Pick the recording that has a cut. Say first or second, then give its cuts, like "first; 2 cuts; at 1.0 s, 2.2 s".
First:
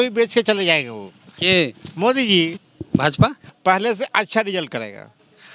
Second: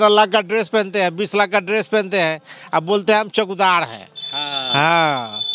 first; 1 cut; at 2.7 s